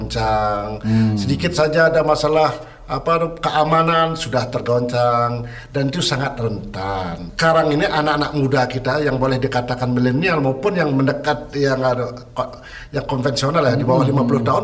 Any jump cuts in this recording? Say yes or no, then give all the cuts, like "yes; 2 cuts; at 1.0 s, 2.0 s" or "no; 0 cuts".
yes; 1 cut; at 7.2 s